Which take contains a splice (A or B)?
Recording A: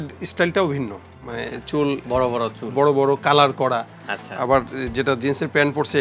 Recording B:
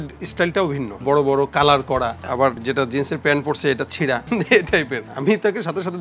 B